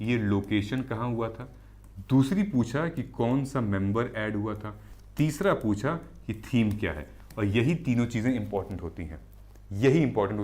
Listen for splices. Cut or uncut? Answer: uncut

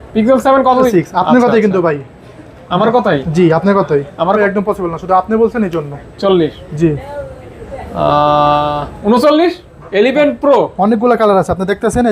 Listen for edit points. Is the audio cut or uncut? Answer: cut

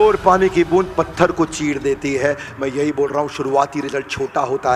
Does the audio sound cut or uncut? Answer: uncut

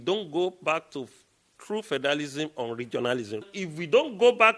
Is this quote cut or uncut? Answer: cut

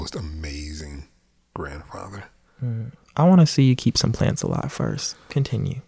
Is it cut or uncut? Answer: uncut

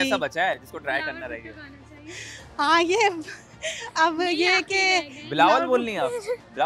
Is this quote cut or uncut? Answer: uncut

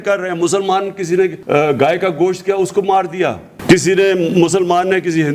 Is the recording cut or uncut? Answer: cut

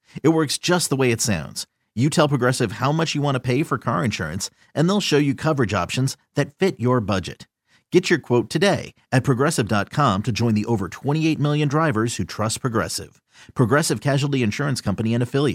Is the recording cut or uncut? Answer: uncut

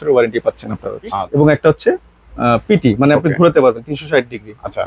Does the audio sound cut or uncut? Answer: cut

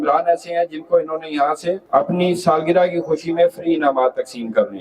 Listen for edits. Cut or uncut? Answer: cut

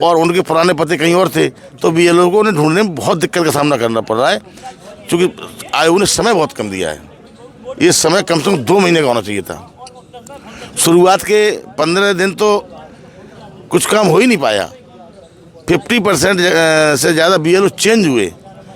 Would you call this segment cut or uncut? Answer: uncut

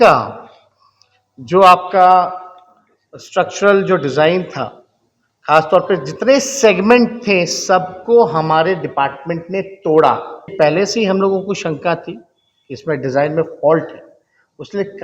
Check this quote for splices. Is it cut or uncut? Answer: cut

